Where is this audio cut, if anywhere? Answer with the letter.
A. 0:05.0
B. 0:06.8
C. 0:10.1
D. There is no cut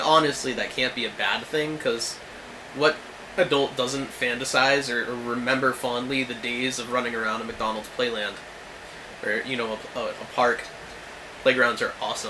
C